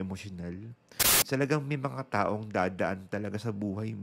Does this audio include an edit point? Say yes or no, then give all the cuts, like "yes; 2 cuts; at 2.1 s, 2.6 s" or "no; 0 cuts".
yes; 1 cut; at 1.3 s